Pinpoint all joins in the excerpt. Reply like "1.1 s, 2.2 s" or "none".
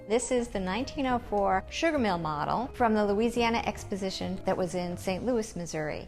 1.7 s, 2.7 s, 4.4 s

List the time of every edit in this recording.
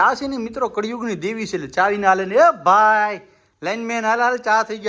none

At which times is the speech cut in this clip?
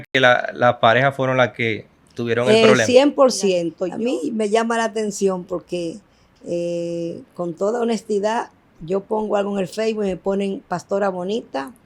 3.8 s

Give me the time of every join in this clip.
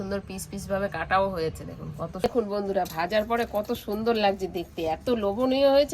2.1 s

